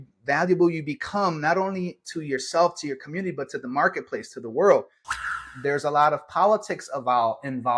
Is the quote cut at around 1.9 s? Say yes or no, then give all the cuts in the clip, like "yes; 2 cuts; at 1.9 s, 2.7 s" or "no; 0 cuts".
no; 1 cut; at 5.4 s